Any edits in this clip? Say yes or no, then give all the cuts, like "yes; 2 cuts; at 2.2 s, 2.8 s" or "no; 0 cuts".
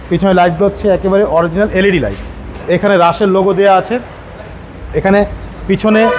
yes; 1 cut; at 2.6 s